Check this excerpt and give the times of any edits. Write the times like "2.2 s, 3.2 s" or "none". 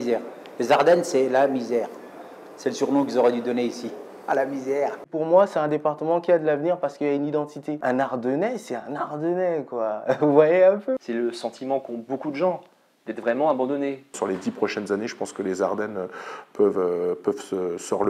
5.0 s, 7.8 s, 11.0 s, 14.1 s